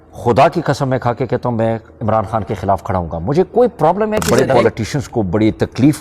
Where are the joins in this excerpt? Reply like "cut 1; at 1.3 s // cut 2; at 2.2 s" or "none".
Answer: cut 1; at 4.2 s